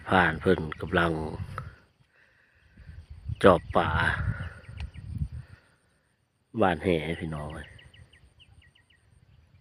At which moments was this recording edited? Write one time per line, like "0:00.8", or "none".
none